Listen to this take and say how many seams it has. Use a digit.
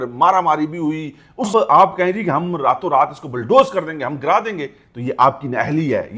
1